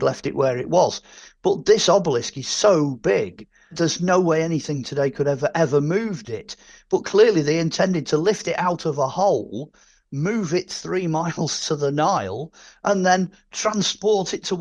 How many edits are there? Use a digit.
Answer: 1